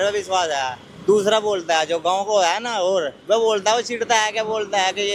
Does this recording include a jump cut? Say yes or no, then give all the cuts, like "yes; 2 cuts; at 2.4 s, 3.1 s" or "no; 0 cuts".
no; 0 cuts